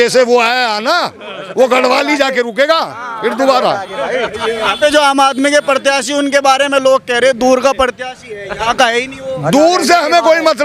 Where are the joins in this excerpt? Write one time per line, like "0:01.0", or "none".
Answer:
none